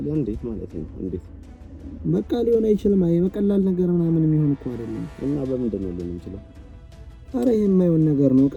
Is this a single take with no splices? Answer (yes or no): yes